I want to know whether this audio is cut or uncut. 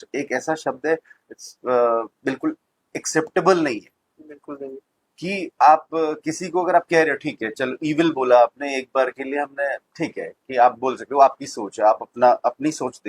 uncut